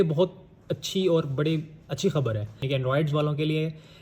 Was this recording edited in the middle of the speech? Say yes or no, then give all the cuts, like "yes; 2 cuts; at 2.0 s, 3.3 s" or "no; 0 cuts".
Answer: yes; 1 cut; at 2.6 s